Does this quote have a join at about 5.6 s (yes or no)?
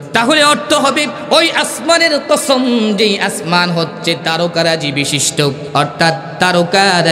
yes